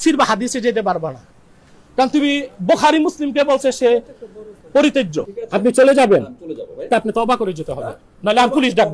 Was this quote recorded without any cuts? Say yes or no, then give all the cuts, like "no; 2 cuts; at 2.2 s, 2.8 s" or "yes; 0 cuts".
no; 1 cut; at 5.4 s